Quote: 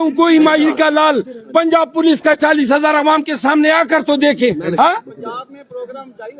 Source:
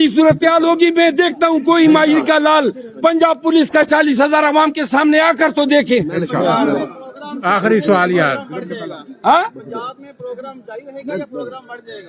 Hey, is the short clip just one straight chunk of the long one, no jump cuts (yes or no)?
no